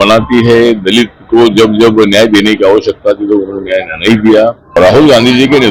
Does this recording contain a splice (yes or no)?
yes